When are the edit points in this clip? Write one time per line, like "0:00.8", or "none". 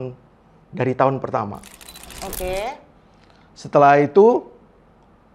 0:02.1